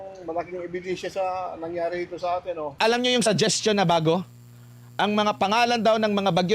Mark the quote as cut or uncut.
cut